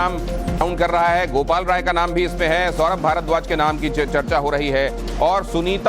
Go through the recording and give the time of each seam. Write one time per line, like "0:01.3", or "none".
0:00.9